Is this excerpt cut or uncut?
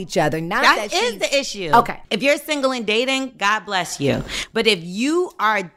cut